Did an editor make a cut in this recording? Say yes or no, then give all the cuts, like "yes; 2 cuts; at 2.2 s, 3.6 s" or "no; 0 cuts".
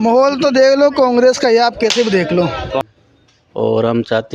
yes; 1 cut; at 2.8 s